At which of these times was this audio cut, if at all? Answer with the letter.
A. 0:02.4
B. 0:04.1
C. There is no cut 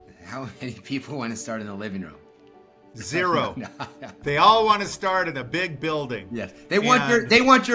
C